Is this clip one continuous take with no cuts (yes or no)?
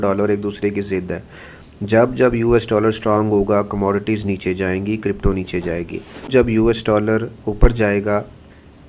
yes